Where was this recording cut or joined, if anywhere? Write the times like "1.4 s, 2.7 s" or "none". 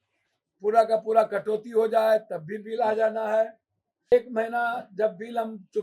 4.1 s